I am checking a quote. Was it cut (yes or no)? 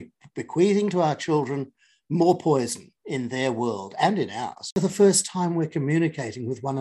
yes